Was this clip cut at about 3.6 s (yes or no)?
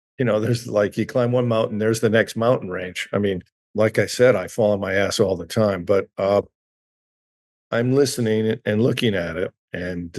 yes